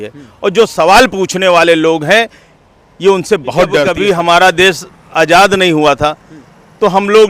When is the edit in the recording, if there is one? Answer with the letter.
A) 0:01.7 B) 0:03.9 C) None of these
B